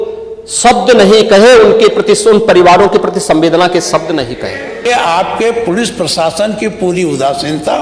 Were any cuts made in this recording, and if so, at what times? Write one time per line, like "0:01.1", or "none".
0:04.8